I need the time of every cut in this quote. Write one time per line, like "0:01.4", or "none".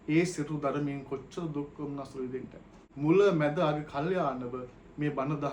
0:02.8